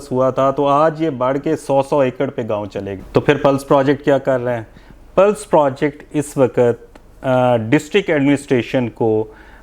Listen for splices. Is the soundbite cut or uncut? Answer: cut